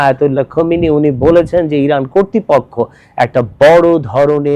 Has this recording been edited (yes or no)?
no